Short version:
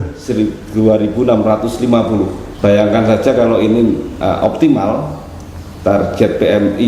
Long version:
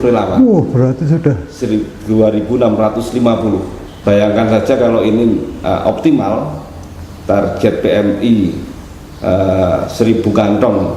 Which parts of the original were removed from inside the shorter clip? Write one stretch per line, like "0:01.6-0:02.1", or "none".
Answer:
0:03.8-0:03.9